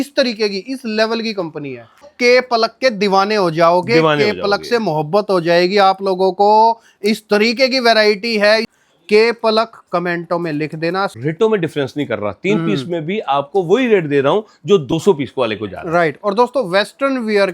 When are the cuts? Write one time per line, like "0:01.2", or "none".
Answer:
0:02.1
0:08.7
0:11.1